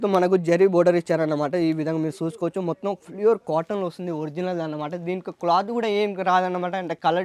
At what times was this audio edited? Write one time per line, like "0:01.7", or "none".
none